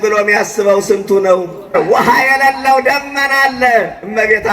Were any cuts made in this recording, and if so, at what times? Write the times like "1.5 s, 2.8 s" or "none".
1.7 s